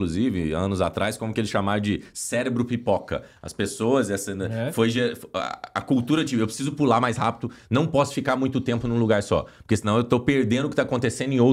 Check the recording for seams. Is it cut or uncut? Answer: uncut